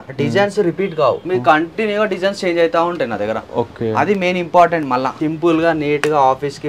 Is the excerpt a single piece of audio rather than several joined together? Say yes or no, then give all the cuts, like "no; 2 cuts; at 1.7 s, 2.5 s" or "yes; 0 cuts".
no; 2 cuts; at 1.2 s, 5.1 s